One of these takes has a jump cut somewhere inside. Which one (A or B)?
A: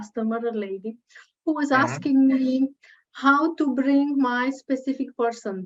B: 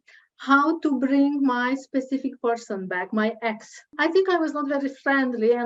B